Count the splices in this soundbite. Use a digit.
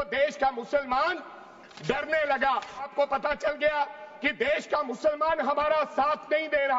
1